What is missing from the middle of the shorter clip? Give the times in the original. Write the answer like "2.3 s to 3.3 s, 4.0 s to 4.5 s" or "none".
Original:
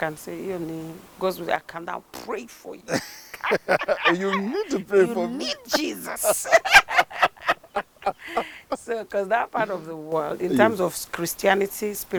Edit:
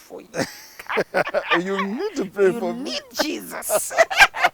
none